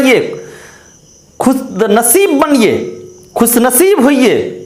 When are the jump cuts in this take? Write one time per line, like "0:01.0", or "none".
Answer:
none